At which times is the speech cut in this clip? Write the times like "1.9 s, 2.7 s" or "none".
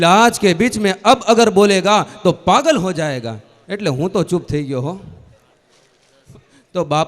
6.2 s